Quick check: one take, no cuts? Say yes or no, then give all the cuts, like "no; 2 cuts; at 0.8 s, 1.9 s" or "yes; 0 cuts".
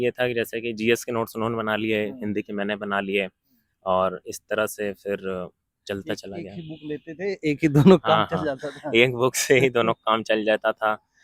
yes; 0 cuts